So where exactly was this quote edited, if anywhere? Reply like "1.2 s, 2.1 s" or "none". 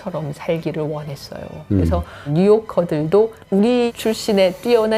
2.3 s, 3.6 s